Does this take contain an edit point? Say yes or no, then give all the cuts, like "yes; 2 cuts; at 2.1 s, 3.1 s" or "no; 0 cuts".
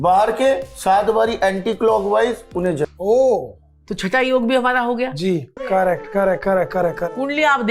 yes; 2 cuts; at 2.8 s, 5.6 s